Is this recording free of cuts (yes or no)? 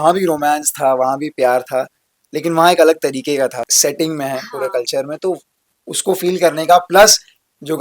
no